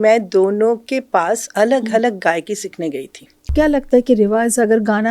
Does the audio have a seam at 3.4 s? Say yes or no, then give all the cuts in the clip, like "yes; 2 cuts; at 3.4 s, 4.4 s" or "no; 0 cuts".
yes; 1 cut; at 3.4 s